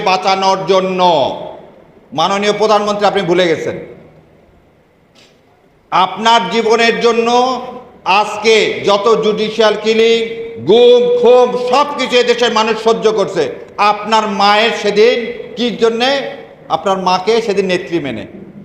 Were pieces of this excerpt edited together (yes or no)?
no